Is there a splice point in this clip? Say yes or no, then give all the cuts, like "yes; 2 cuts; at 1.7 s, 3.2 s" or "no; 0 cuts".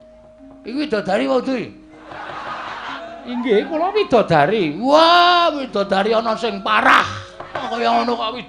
yes; 2 cuts; at 3.0 s, 7.6 s